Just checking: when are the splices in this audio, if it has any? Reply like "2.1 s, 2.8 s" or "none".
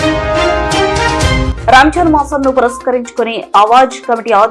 1.4 s